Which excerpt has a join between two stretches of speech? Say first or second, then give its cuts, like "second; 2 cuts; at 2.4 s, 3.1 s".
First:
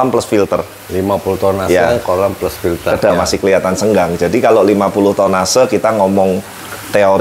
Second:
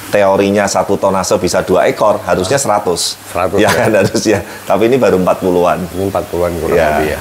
first; 1 cut; at 3.1 s